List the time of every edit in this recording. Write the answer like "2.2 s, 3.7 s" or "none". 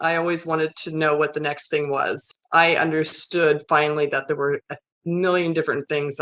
2.2 s